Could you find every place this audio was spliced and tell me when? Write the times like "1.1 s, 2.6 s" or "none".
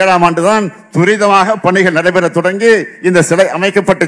none